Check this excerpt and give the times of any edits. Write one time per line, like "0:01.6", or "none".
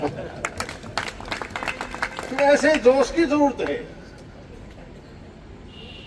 none